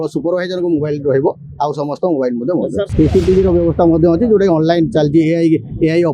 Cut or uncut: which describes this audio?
cut